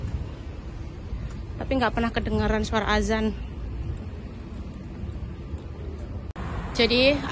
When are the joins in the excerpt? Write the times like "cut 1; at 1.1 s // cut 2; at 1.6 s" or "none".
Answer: cut 1; at 6.3 s